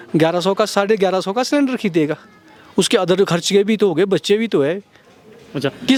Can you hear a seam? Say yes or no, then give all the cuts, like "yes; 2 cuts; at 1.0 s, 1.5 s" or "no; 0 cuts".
no; 0 cuts